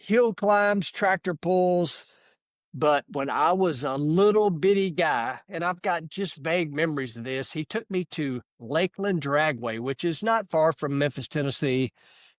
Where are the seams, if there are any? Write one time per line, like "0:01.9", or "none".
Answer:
none